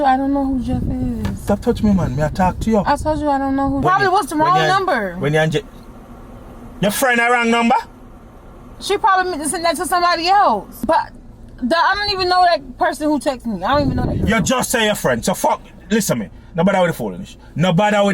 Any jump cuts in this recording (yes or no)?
yes